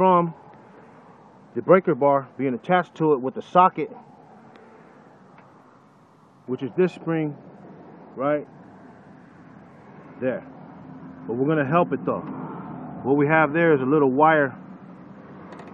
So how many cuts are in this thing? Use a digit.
0